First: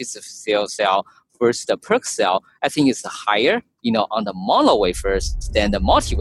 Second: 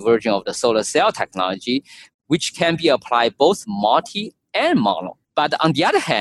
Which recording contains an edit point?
second; 1 cut; at 5.2 s

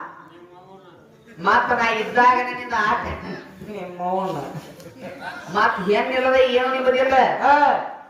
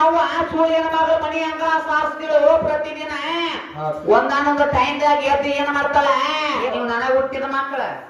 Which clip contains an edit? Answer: second; 1 cut; at 6.7 s

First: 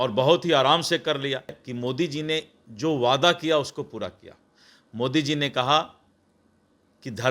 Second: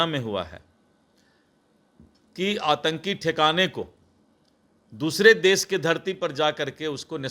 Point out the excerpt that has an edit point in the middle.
first; 1 cut; at 1.6 s

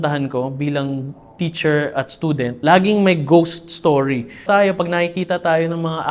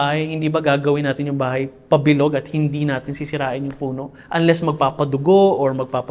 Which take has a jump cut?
first; 2 cuts; at 2.5 s, 4.4 s

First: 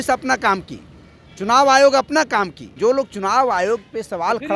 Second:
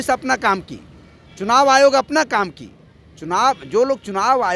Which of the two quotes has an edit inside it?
first; 1 cut; at 2.7 s

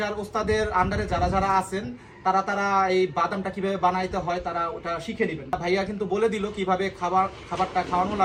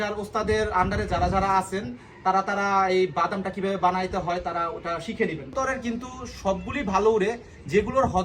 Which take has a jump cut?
second; 1 cut; at 5.5 s

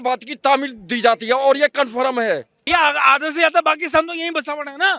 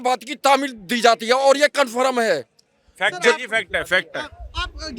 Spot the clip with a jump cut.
first; 1 cut; at 2.7 s

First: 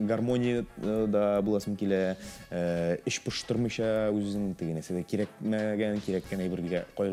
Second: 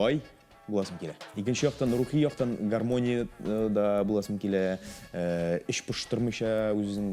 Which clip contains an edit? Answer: second; 1 cut; at 1.2 s

